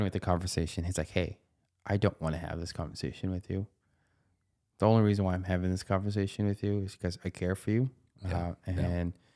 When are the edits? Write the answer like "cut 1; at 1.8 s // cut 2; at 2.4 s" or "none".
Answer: none